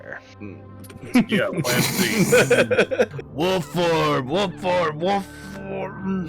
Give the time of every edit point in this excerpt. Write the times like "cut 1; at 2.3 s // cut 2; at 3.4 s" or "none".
cut 1; at 3.2 s